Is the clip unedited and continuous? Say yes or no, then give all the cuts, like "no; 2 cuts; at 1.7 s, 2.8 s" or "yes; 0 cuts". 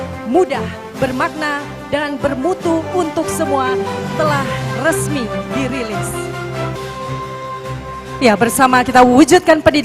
no; 1 cut; at 6.7 s